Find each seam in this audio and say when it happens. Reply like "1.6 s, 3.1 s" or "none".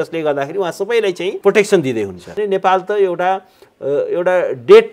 1.4 s, 2.4 s

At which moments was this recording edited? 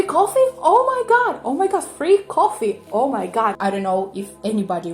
3.6 s

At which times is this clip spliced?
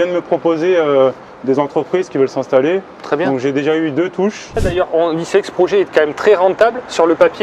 4.7 s

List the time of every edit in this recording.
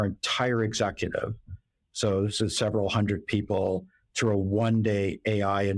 none

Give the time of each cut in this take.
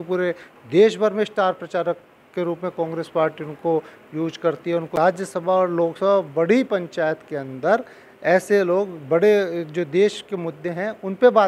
5.0 s

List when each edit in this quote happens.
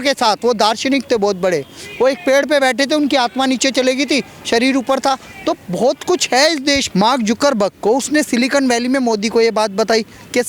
6.9 s

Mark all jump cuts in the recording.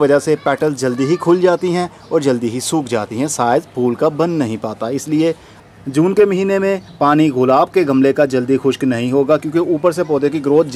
5.5 s

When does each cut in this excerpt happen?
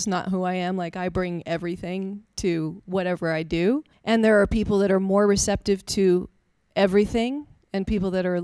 3.9 s

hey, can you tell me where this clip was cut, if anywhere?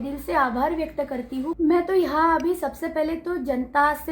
1.5 s

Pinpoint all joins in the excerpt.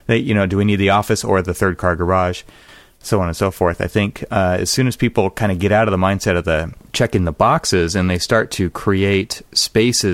6.8 s

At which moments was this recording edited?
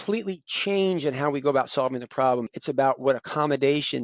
2.5 s

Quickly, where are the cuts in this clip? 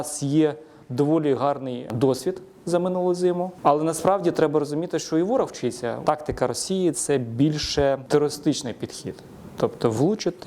1.9 s, 3.5 s, 6.0 s, 8.0 s

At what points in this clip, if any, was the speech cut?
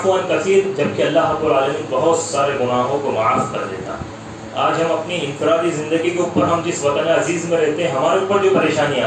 none

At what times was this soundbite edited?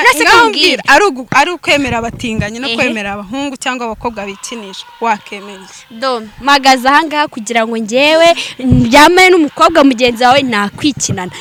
none

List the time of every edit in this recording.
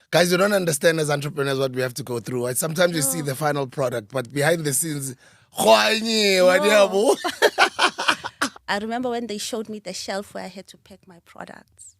8.6 s

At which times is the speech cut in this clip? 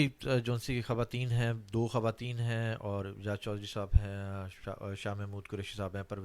none

